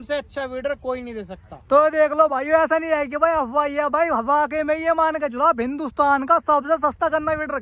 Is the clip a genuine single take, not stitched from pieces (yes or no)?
yes